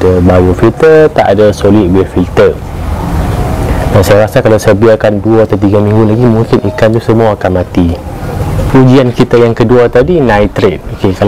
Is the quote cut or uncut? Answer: uncut